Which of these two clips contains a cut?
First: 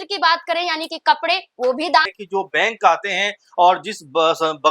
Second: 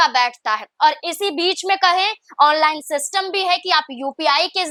first; 1 cut; at 2.2 s

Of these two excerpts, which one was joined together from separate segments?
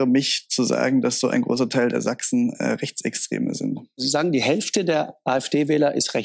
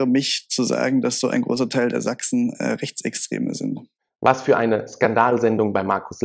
first; 1 cut; at 4.0 s

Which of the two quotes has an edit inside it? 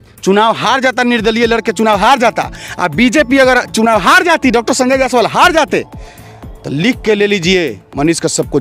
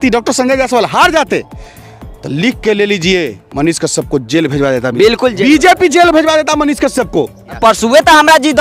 second; 1 cut; at 7.5 s

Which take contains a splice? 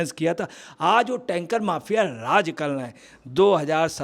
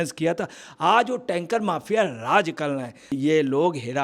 second; 1 cut; at 3.0 s

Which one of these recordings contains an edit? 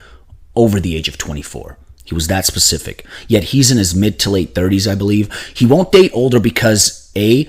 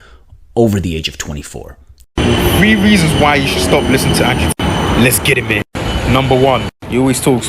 second; 1 cut; at 2.1 s

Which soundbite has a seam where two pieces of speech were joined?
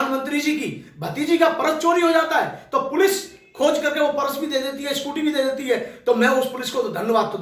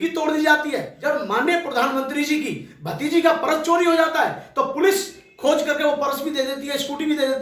second; 1 cut; at 0.9 s

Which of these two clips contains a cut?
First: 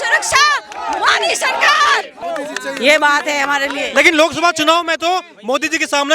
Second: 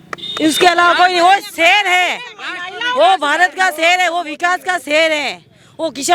first; 1 cut; at 2.1 s

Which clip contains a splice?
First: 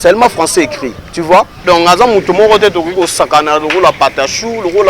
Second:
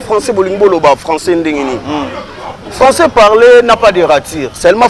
first; 1 cut; at 1.6 s

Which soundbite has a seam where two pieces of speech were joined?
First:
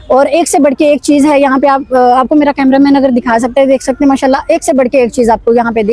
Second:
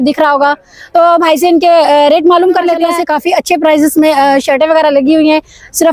second; 1 cut; at 2.9 s

